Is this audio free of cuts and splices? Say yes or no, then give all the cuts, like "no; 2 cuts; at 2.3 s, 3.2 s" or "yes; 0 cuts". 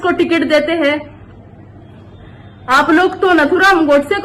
yes; 0 cuts